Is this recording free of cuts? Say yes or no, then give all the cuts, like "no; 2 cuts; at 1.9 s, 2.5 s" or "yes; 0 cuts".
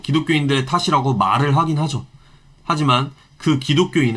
yes; 0 cuts